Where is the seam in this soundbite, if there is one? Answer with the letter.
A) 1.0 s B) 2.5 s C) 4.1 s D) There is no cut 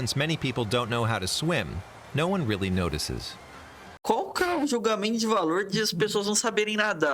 C